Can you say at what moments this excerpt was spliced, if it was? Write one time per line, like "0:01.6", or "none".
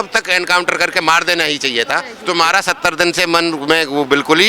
0:02.1

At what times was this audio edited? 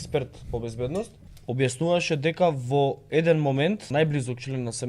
0:01.3
0:03.9

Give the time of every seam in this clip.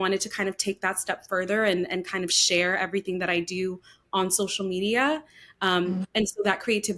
none

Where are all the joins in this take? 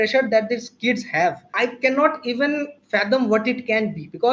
0:01.5

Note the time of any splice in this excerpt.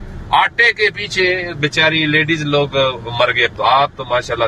0:03.5

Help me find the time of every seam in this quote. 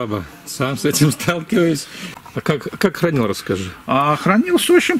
0:02.1

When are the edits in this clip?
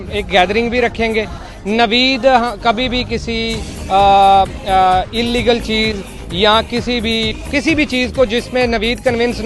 0:01.5
0:07.4

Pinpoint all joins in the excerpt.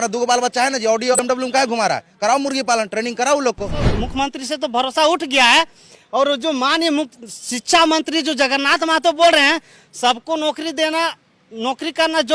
0:01.2
0:03.9

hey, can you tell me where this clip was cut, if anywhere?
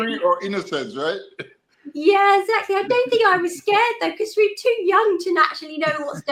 none

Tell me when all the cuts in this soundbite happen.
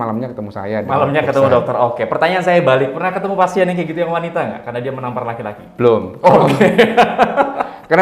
none

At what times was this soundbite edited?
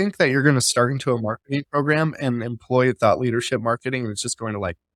none

